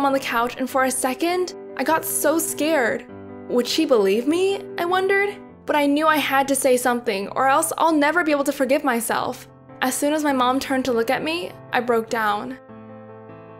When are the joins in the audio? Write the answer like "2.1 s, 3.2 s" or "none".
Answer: 12.6 s